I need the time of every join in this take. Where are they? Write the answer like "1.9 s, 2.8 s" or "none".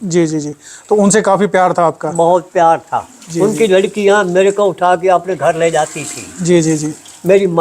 none